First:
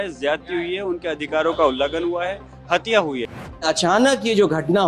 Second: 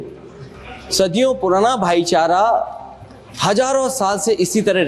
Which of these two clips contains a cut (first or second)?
first